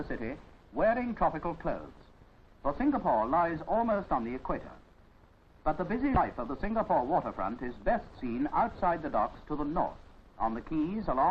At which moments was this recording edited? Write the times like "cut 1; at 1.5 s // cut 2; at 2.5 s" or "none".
cut 1; at 9.7 s

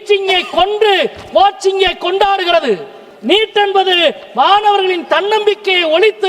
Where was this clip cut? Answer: cut 1; at 3.1 s

